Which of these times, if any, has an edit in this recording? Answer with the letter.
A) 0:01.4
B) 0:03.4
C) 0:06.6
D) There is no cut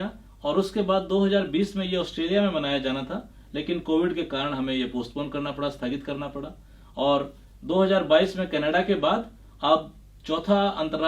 D